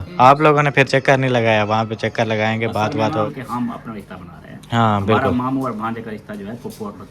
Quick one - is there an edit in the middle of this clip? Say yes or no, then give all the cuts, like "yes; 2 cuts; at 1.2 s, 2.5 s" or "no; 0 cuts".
yes; 1 cut; at 3.3 s